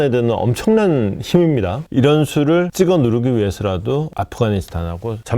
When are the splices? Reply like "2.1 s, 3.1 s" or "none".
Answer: 4.1 s